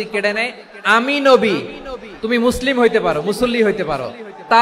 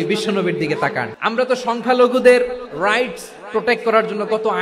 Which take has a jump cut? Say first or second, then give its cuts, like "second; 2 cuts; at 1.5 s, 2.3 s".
second; 1 cut; at 1.1 s